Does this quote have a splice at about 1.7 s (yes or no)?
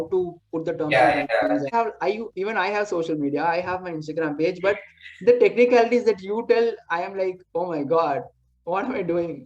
yes